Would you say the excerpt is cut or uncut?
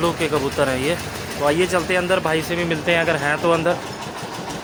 uncut